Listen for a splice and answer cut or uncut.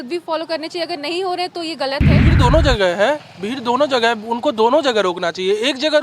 cut